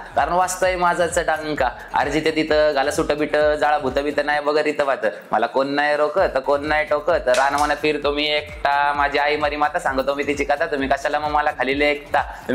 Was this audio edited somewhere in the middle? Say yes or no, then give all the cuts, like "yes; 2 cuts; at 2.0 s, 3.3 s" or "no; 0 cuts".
no; 0 cuts